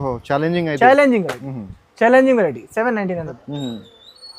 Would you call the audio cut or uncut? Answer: uncut